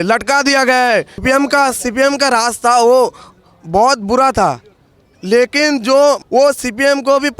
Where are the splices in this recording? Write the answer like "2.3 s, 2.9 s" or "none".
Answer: 1.1 s, 6.2 s